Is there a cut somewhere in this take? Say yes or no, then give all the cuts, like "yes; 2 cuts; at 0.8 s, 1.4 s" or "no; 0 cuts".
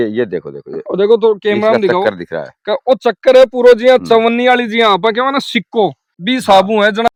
no; 0 cuts